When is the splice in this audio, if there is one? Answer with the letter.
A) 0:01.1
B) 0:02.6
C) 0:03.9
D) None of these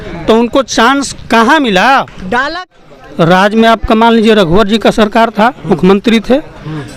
B